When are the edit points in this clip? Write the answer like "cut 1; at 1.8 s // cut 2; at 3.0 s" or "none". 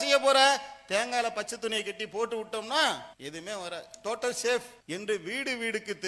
cut 1; at 3.2 s // cut 2; at 4.8 s